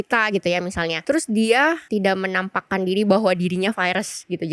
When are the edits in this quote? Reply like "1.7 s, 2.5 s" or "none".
1.0 s, 1.8 s

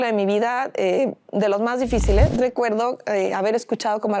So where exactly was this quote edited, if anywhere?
2.3 s

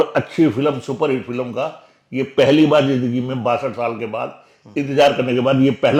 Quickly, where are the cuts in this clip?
none

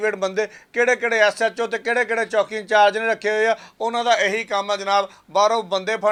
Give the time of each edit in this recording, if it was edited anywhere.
none

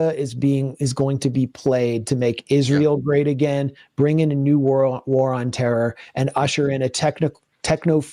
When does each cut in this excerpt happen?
none

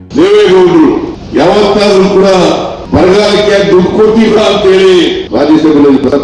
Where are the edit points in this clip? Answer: 1.2 s, 2.7 s, 5.2 s

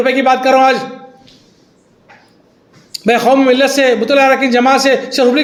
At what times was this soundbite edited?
none

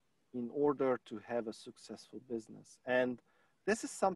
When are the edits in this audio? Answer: none

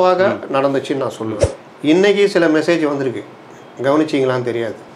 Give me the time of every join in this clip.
1.5 s

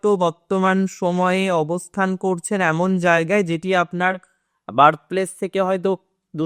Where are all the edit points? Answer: none

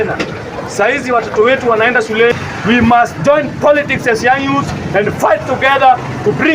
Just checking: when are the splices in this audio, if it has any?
2.4 s

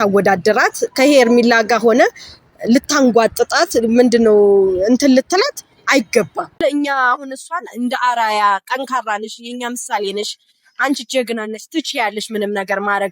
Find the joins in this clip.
6.5 s

